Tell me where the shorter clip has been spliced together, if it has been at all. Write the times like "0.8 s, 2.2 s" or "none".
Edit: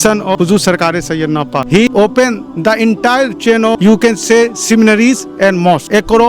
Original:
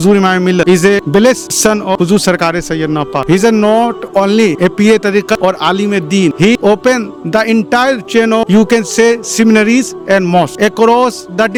1.7 s